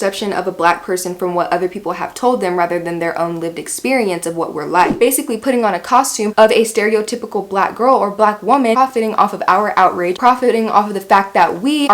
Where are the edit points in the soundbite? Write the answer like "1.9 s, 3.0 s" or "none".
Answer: 5.0 s, 8.8 s, 10.2 s

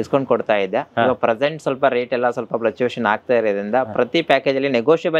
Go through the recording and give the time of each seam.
none

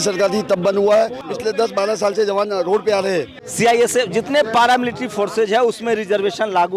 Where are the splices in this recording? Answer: 1.2 s, 3.4 s

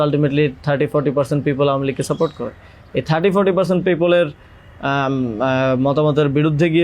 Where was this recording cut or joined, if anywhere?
none

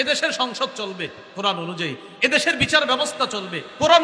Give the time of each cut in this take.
none

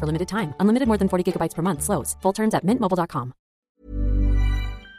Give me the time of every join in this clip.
3.7 s

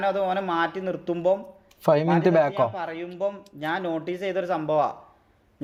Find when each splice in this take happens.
none

